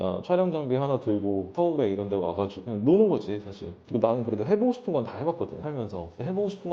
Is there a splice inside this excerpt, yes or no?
yes